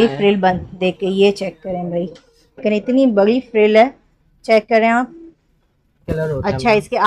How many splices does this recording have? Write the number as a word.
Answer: two